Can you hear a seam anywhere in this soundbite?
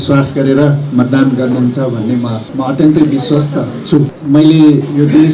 yes; 2 cuts; at 2.4 s, 4.2 s

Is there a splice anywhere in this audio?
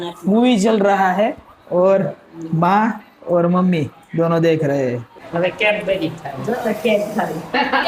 yes; 1 cut; at 5.1 s

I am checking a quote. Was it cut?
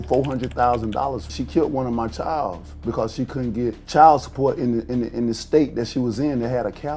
yes; 2 cuts; at 1.3 s, 3.8 s

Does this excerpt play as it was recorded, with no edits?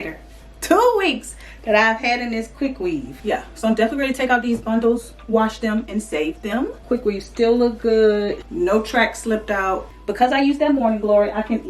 no; 4 cuts; at 3.1 s, 6.8 s, 8.4 s, 9.9 s

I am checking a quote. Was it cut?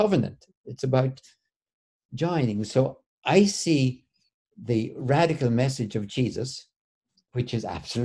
no; 0 cuts

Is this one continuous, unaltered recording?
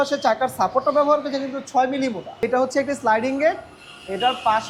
no; 1 cut; at 2.4 s

